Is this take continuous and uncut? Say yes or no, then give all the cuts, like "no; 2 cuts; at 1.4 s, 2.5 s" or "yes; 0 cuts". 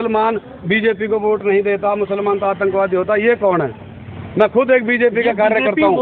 yes; 0 cuts